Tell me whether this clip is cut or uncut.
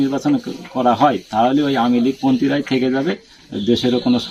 uncut